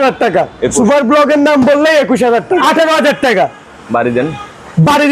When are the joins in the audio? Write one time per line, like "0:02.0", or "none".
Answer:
0:02.6